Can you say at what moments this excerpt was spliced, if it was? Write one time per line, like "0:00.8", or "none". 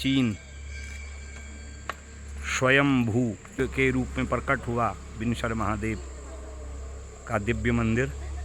0:03.6